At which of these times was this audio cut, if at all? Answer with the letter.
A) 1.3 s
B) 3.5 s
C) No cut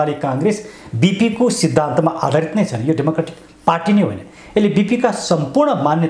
C